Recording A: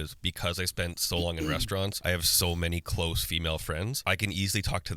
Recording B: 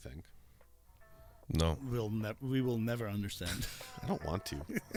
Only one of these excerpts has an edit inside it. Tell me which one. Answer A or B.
A